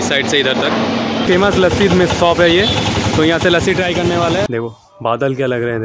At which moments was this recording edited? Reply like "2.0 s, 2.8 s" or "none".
1.2 s, 4.5 s